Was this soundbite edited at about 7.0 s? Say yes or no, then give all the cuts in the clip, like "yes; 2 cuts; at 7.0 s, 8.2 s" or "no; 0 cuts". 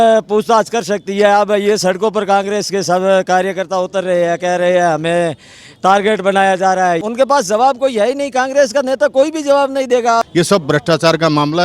yes; 2 cuts; at 7.0 s, 10.3 s